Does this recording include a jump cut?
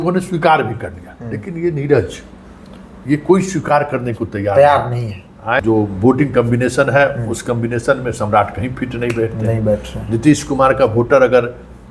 yes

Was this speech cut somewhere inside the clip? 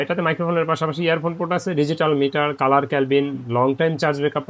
no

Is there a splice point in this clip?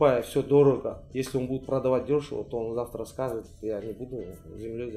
no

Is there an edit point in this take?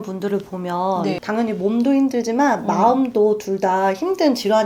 yes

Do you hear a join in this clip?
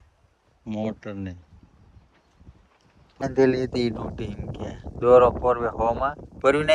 yes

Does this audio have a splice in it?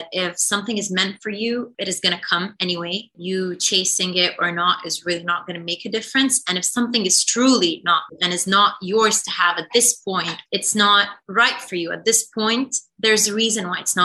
yes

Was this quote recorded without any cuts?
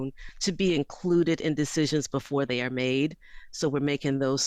yes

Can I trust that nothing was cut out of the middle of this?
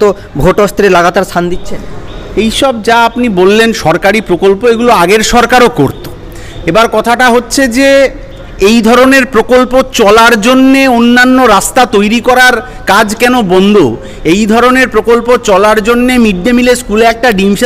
yes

